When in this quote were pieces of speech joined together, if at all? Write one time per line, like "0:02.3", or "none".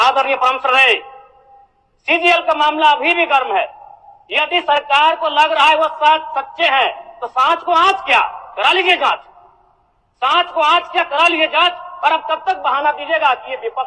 none